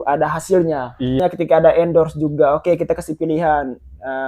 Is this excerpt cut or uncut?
cut